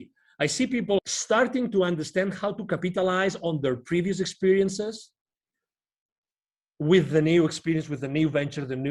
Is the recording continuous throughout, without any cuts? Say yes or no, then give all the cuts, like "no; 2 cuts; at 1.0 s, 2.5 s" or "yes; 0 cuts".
no; 1 cut; at 1.0 s